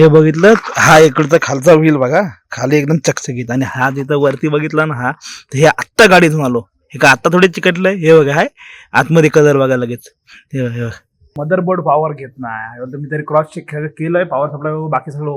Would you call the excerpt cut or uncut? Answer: cut